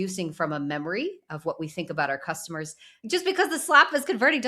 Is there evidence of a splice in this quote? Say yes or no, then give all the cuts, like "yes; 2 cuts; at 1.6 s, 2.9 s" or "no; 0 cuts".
yes; 1 cut; at 3.0 s